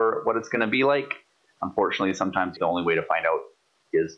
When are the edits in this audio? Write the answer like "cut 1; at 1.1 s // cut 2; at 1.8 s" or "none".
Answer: cut 1; at 2.6 s